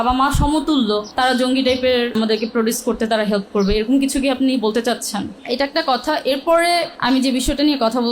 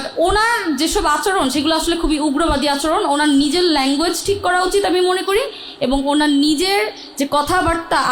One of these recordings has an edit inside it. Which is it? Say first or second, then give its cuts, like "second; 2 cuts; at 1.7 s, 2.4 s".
first; 4 cuts; at 1.1 s, 2.1 s, 5.3 s, 6.9 s